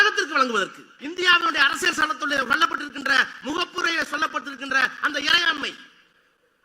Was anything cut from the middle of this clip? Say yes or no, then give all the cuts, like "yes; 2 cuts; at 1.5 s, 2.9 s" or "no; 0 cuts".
yes; 1 cut; at 0.9 s